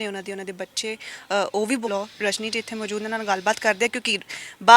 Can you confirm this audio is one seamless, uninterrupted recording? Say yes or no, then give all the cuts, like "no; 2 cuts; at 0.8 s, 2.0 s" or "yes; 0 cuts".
no; 1 cut; at 1.9 s